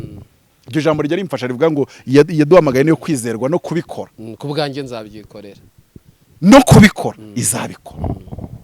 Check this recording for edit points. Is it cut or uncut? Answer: uncut